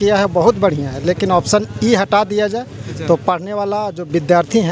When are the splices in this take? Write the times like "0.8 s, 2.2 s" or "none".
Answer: none